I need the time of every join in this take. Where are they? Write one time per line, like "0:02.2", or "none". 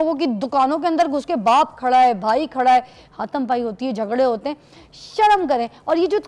none